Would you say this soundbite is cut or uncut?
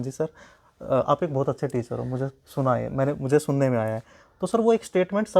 uncut